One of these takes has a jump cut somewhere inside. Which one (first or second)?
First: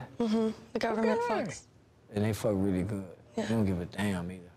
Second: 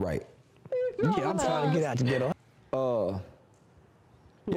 second